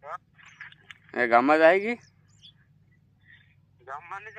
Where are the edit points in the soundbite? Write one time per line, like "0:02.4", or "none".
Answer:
none